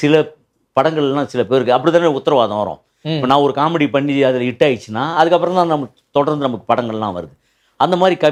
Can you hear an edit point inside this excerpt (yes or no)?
no